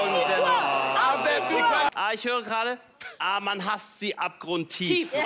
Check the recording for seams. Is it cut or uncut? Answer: cut